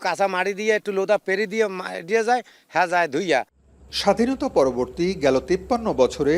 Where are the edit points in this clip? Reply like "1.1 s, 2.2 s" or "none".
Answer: none